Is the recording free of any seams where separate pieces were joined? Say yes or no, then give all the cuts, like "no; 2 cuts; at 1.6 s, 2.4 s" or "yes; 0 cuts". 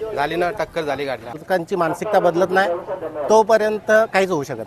no; 1 cut; at 1.4 s